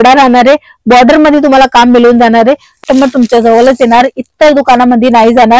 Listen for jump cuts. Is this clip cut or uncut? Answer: cut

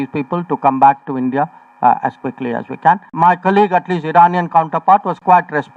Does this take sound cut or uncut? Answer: cut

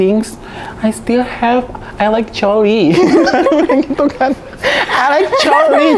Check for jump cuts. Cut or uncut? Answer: uncut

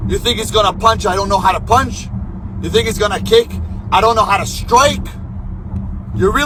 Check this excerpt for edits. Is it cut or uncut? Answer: uncut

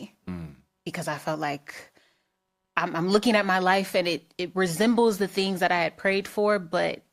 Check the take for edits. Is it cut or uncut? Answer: uncut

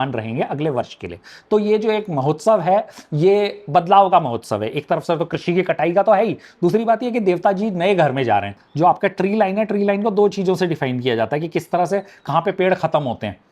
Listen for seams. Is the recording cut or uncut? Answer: cut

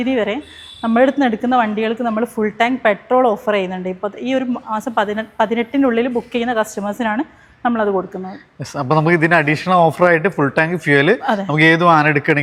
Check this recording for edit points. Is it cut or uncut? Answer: uncut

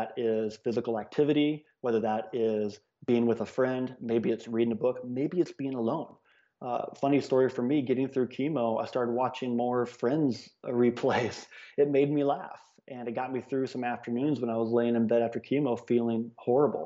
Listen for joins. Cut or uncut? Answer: uncut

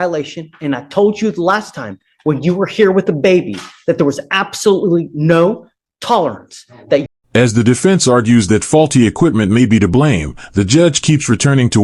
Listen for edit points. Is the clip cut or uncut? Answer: uncut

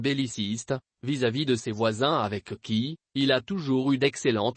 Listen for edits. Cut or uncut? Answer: cut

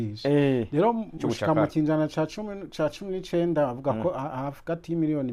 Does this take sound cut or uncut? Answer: cut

